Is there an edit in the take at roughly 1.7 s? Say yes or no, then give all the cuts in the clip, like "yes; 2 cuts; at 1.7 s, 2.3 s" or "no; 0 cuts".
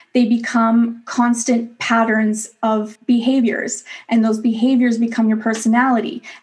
no; 1 cut; at 2.9 s